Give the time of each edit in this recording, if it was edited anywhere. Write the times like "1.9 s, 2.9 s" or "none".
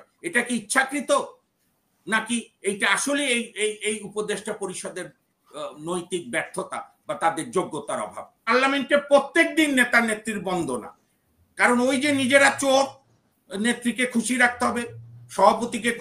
8.5 s